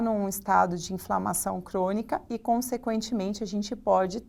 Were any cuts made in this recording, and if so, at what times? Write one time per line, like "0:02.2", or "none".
none